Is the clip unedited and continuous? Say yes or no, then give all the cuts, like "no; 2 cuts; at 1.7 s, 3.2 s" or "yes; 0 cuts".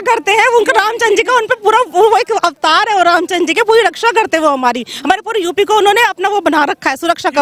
yes; 0 cuts